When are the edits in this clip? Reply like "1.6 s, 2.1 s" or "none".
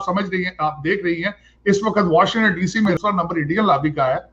2.9 s